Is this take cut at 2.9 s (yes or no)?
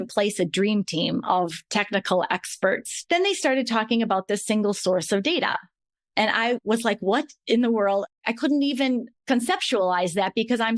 yes